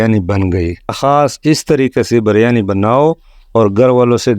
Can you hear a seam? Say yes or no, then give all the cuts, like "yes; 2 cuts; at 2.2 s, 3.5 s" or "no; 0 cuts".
yes; 1 cut; at 1.0 s